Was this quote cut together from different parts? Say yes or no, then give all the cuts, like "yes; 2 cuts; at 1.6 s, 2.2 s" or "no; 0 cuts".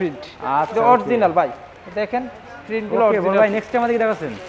no; 0 cuts